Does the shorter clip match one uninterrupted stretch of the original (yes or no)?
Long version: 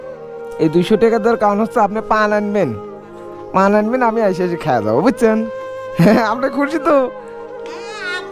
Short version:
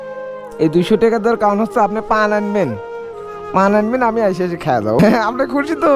no